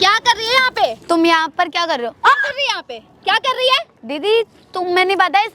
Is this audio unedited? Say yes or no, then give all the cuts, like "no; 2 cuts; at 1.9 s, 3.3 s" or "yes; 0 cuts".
yes; 0 cuts